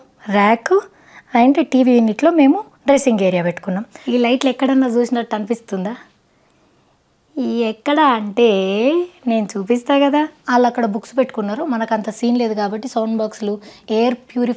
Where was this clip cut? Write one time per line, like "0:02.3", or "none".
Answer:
0:04.0
0:10.4